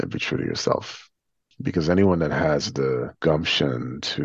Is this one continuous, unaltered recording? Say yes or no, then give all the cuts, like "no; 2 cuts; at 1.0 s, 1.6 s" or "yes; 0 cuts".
no; 1 cut; at 3.1 s